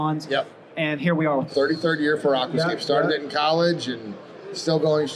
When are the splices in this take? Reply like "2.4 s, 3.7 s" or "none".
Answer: 1.5 s